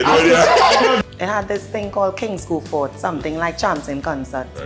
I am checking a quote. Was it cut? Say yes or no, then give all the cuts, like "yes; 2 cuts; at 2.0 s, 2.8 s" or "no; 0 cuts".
yes; 1 cut; at 1.0 s